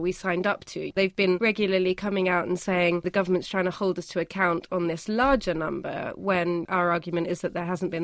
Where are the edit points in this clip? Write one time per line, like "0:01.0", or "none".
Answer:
0:01.0
0:03.1
0:06.6